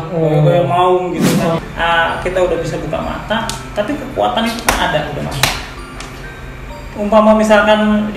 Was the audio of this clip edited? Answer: yes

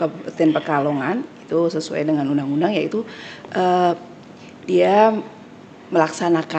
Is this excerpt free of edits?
yes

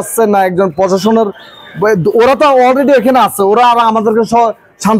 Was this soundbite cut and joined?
no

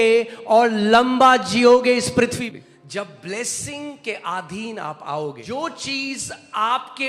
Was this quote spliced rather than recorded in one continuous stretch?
yes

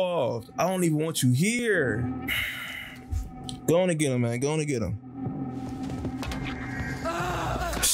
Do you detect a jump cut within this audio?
yes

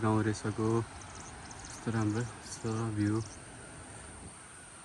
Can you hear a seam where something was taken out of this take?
no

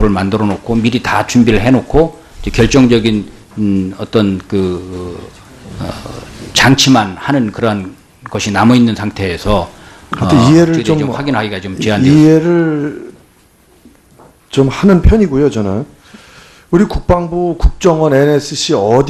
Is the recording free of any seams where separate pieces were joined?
no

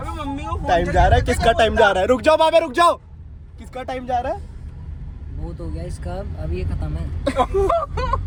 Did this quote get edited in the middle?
no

